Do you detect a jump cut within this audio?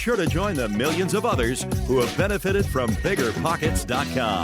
no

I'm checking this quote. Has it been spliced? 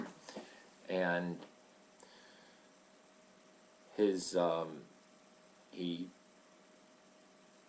yes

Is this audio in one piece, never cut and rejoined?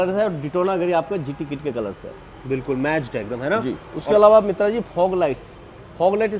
yes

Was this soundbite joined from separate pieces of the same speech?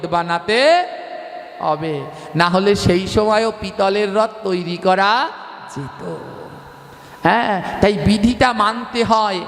no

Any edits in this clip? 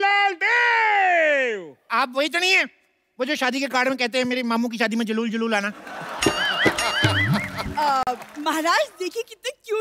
no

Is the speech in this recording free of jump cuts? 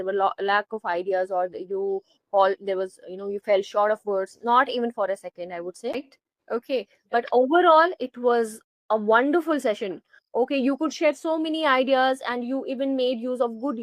no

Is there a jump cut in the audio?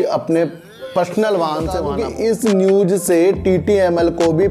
yes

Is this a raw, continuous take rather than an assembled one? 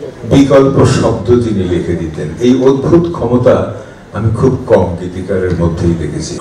yes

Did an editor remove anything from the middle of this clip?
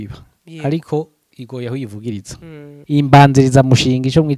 yes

